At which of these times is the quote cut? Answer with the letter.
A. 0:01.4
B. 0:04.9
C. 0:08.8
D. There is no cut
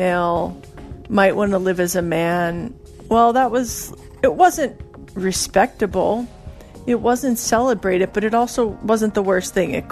C